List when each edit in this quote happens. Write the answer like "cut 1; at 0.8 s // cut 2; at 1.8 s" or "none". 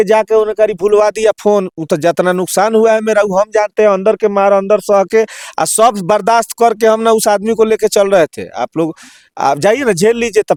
none